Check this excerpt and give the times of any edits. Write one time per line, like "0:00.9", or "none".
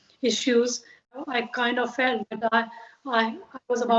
0:01.1